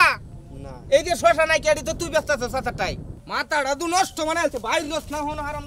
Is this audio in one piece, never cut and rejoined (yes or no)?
no